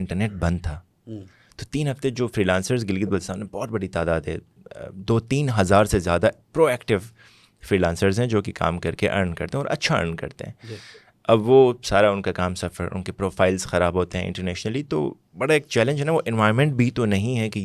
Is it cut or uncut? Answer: uncut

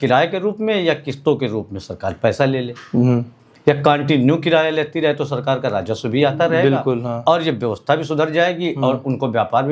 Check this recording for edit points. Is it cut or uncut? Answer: uncut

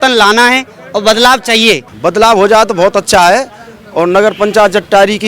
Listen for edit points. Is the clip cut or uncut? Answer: cut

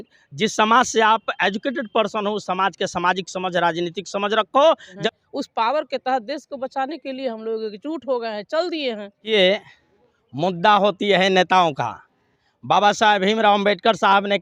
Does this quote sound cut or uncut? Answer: cut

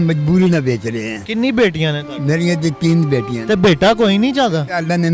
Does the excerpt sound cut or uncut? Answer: uncut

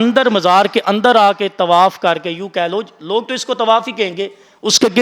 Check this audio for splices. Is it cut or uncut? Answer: uncut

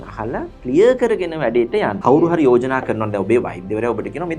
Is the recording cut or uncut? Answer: cut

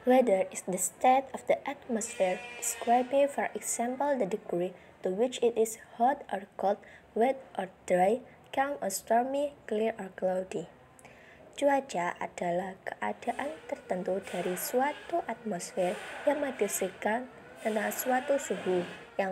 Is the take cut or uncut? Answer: uncut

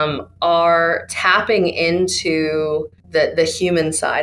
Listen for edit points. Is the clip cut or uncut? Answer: cut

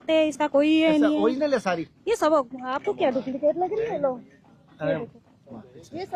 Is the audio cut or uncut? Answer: uncut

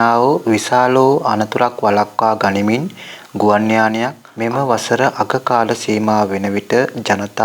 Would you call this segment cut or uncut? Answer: cut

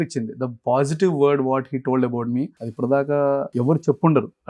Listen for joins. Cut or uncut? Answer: cut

